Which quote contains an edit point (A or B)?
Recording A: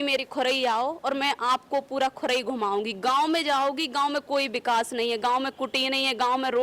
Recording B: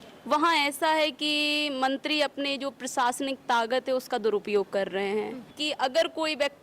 B